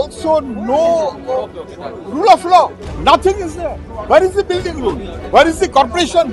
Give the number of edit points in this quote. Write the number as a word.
three